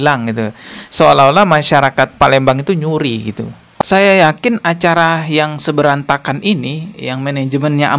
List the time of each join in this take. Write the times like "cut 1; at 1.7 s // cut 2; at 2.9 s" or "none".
cut 1; at 3.8 s